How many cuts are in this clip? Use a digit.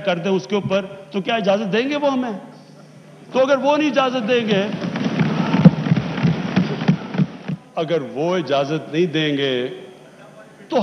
1